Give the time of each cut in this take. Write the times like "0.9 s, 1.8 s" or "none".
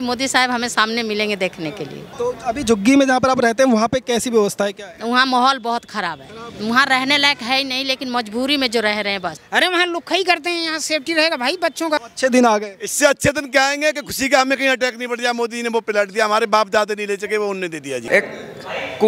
2.0 s, 9.3 s, 12.0 s, 18.0 s